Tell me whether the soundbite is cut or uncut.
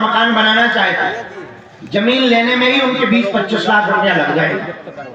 uncut